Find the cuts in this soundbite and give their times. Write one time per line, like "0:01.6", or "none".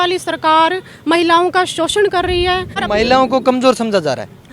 0:02.8